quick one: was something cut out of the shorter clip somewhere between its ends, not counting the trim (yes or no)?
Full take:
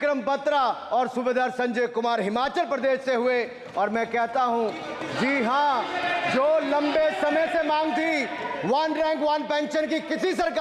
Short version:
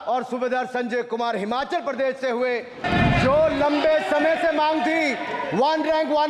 yes